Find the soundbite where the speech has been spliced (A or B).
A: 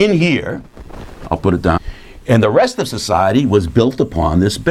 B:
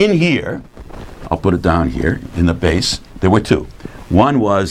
B